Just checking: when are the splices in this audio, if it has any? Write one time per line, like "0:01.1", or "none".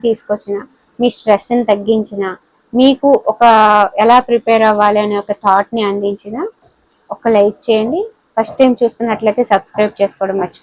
none